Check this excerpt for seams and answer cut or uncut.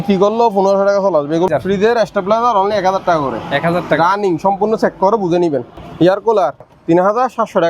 cut